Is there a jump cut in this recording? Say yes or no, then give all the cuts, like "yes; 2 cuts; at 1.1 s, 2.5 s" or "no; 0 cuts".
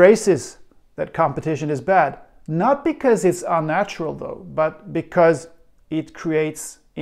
no; 0 cuts